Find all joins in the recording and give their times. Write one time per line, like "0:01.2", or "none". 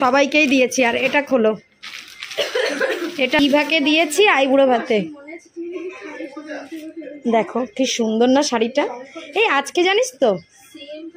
none